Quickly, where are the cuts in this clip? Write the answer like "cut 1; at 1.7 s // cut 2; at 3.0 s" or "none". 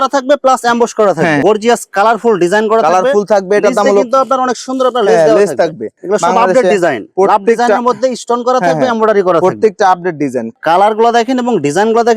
cut 1; at 1.4 s // cut 2; at 6.0 s // cut 3; at 10.5 s